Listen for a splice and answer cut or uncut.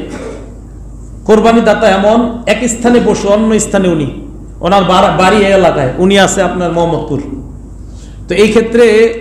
uncut